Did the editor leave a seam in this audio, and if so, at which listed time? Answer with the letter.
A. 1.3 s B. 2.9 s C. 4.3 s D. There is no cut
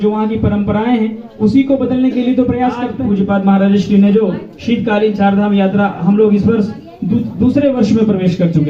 B